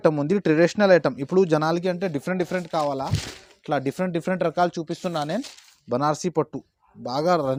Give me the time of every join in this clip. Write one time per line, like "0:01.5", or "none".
none